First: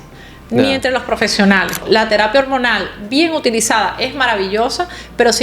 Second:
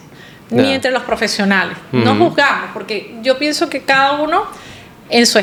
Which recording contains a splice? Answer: first; 1 cut; at 1.8 s

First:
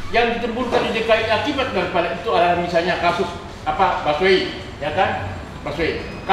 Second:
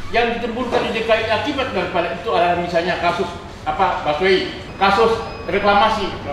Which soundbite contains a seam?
second; 1 cut; at 4.6 s

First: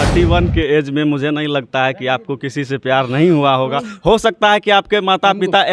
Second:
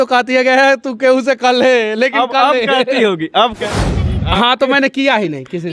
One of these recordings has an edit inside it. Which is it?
second; 1 cut; at 3.7 s

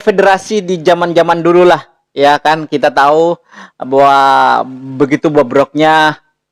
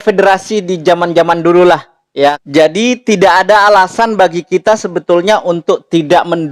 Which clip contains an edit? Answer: second; 1 cut; at 2.4 s

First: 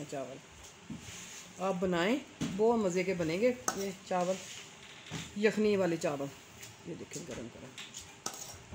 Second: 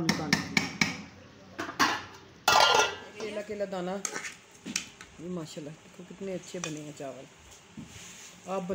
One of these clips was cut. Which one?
second; 1 cut; at 3.3 s

